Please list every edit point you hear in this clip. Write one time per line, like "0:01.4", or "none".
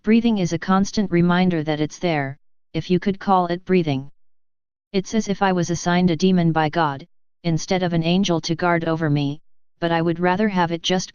0:01.1